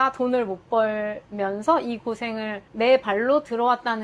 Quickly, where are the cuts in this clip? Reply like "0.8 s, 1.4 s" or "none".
none